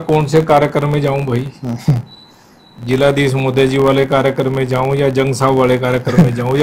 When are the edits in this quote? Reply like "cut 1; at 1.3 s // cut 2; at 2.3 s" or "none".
none